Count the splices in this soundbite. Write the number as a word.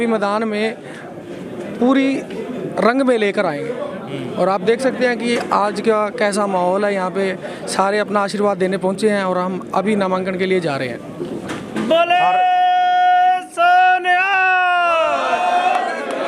zero